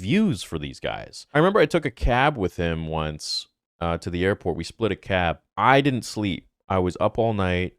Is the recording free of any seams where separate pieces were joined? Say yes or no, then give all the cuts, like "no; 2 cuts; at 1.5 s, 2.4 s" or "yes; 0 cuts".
no; 1 cut; at 1.2 s